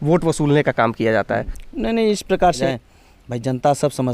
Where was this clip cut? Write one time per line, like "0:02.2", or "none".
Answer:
0:01.6
0:02.6